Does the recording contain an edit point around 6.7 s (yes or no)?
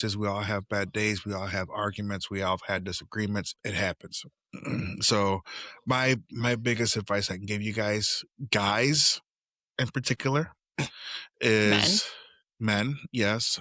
no